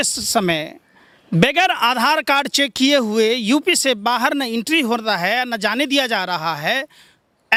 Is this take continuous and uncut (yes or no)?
yes